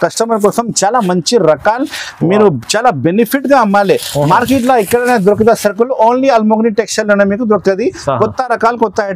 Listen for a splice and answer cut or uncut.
uncut